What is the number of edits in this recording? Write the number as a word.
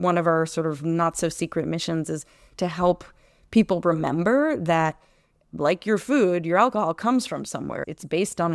zero